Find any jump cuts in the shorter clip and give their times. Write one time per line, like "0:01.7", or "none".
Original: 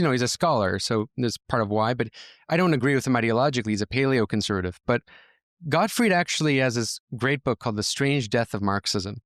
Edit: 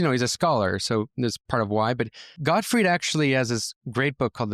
0:02.2